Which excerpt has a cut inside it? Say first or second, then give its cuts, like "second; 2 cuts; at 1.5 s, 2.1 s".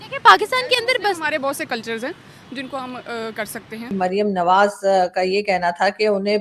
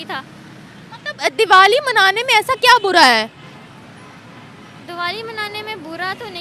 first; 1 cut; at 4.0 s